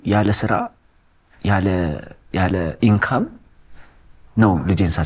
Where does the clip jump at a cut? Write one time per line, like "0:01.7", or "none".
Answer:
none